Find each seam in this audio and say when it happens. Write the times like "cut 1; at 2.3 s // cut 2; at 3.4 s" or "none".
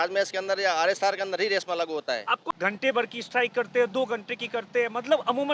cut 1; at 2.4 s